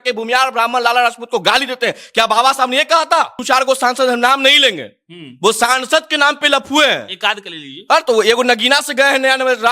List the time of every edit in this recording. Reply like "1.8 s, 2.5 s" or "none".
3.4 s